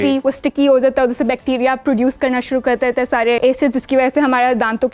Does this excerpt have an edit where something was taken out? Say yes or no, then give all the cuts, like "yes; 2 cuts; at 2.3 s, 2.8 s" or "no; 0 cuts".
yes; 1 cut; at 3.4 s